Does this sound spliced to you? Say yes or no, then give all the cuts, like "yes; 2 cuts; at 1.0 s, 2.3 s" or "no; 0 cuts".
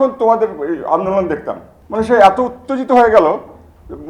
yes; 1 cut; at 1.7 s